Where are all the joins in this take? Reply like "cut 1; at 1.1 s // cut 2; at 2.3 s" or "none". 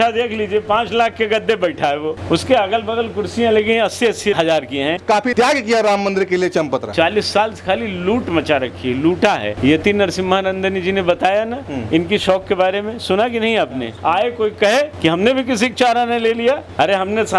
cut 1; at 5.0 s // cut 2; at 6.9 s // cut 3; at 9.6 s // cut 4; at 13.9 s